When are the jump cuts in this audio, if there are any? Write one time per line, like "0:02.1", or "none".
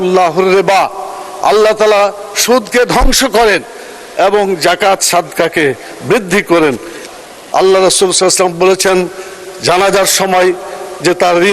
0:07.0